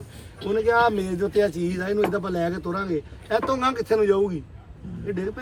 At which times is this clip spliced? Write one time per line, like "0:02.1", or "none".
none